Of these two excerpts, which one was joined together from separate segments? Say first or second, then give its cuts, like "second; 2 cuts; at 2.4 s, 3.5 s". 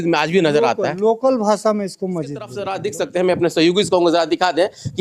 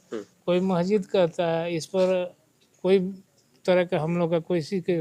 first; 1 cut; at 2.7 s